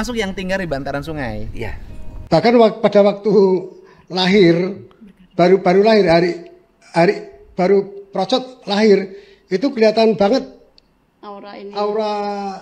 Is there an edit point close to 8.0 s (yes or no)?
no